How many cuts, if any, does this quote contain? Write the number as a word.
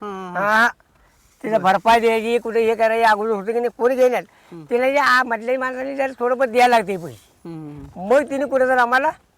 zero